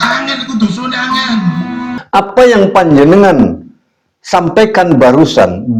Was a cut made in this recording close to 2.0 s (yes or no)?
yes